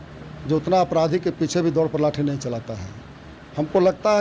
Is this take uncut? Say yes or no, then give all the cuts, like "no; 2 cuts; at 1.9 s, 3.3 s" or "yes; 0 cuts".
yes; 0 cuts